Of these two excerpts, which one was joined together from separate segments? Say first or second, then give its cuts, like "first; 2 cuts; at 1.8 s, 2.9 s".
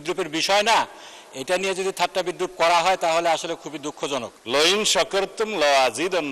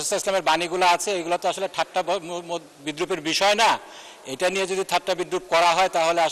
first; 1 cut; at 4.3 s